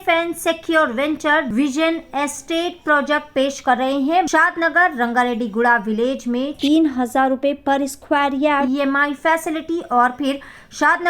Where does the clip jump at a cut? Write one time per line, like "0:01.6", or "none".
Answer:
0:01.5
0:04.3